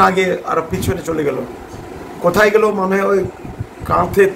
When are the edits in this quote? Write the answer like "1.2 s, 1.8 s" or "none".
none